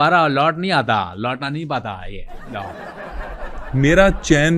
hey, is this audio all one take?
no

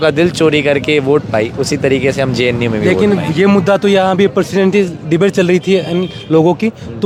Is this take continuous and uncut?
yes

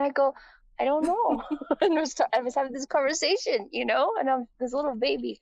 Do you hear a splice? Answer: no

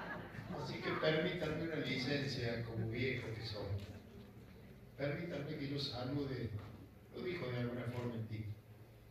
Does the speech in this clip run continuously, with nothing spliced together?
no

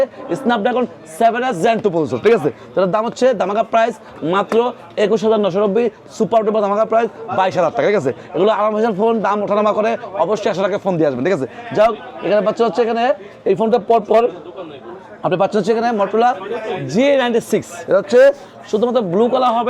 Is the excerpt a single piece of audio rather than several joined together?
yes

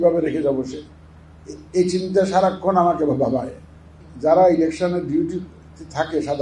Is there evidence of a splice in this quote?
yes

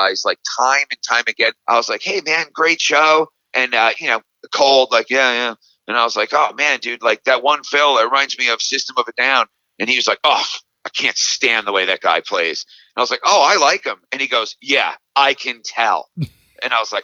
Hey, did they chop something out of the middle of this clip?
yes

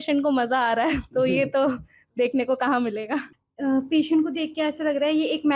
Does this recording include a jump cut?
yes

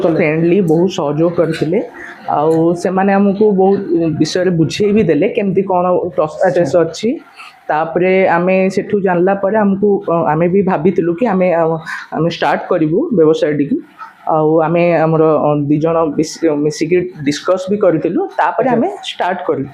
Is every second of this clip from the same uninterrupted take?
yes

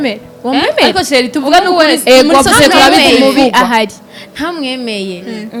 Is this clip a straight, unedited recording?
yes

